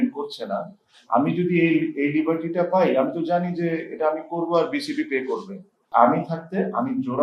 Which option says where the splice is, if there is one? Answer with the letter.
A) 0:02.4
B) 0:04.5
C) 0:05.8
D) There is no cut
C